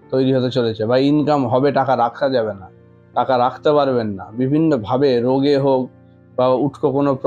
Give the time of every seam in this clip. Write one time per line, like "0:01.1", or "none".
none

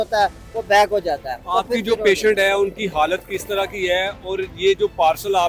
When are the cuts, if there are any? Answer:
none

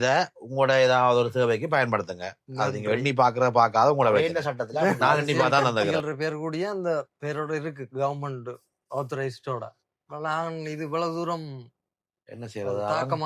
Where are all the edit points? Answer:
0:06.0

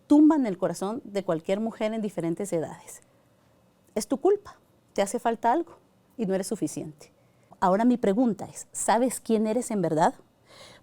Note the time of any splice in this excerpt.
0:07.5

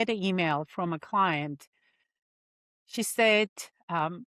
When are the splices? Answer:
none

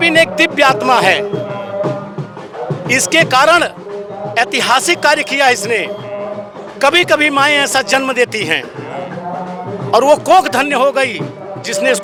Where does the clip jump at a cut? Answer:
none

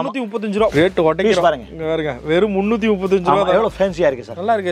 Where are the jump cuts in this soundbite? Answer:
none

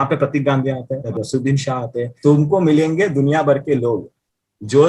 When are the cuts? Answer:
0:01.0
0:02.1

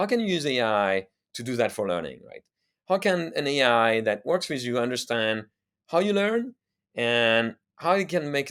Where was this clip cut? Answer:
none

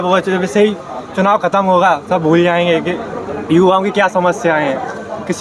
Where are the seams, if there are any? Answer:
none

